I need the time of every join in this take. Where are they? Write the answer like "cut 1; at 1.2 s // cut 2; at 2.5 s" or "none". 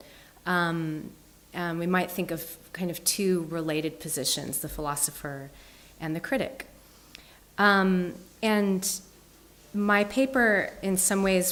none